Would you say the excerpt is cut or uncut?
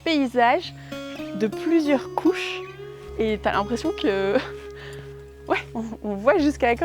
uncut